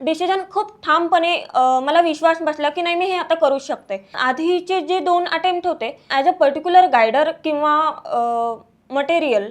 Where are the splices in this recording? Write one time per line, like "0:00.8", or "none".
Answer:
0:04.1
0:06.0